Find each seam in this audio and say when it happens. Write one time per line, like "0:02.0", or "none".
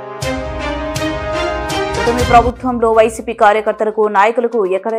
0:01.9